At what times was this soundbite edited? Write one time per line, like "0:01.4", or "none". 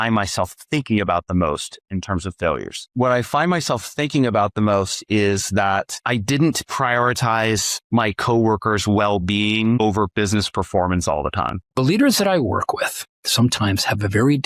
0:11.7